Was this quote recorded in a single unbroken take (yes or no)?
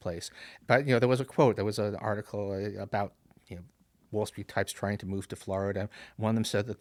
yes